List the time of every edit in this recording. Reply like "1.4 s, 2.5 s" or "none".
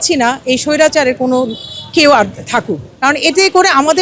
none